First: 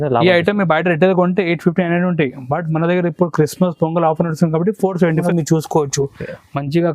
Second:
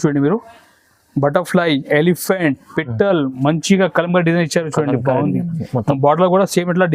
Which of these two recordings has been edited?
first; 1 cut; at 5.2 s

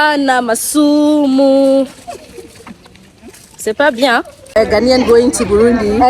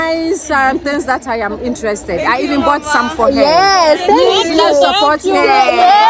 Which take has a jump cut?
first; 1 cut; at 4.5 s

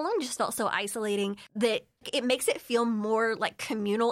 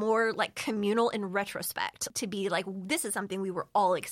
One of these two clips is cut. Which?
second; 1 cut; at 2.1 s

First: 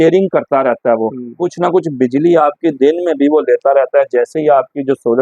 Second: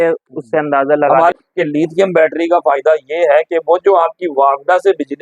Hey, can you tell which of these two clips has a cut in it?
second; 1 cut; at 1.3 s

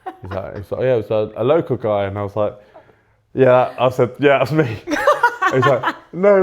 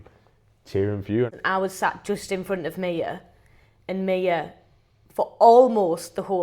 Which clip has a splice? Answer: second; 1 cut; at 1.3 s

